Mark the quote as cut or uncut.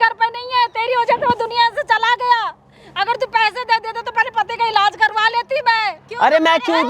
uncut